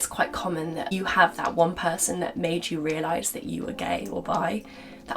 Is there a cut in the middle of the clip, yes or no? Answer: yes